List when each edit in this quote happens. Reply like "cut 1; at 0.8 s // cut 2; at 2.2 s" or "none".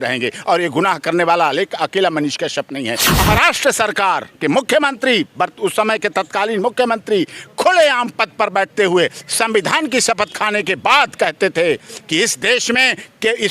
cut 1; at 3.2 s